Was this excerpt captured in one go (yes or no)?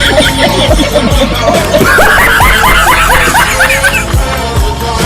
yes